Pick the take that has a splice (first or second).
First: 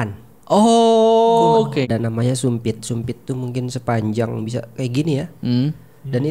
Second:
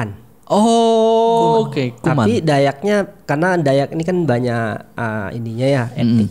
first